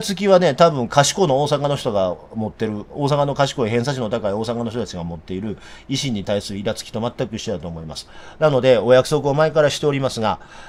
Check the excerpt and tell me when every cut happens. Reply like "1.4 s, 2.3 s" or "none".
none